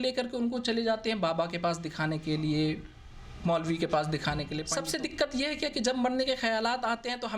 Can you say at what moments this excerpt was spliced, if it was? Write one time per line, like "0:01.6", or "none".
0:04.6